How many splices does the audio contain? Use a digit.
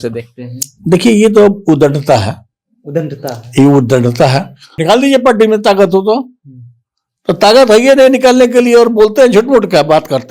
1